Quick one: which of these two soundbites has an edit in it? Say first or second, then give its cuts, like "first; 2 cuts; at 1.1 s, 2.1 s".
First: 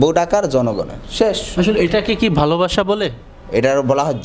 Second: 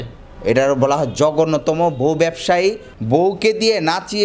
second; 1 cut; at 2.9 s